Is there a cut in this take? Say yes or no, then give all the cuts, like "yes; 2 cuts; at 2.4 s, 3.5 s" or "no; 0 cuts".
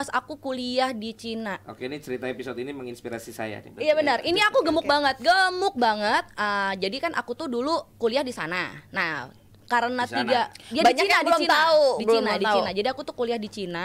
no; 0 cuts